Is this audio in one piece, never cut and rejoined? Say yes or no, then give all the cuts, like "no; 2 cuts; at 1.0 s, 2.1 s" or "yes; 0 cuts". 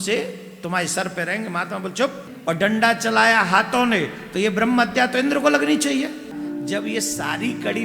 no; 2 cuts; at 2.3 s, 6.3 s